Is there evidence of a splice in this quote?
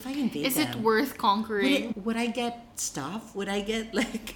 yes; 1 cut; at 1.9 s

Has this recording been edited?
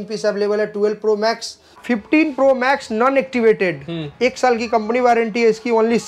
yes; 1 cut; at 2.0 s

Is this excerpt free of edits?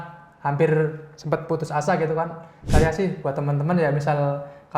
no; 1 cut; at 2.7 s

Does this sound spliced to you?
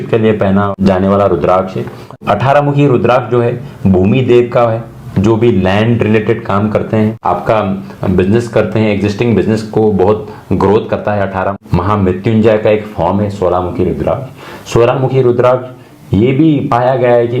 yes; 3 cuts; at 0.8 s, 2.1 s, 11.6 s

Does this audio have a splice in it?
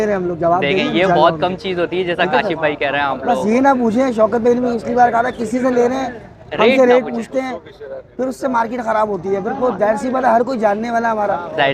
no; 0 cuts

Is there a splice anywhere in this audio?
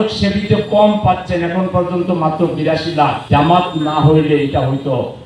yes; 1 cut; at 3.2 s

